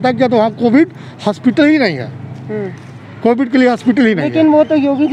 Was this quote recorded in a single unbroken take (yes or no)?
yes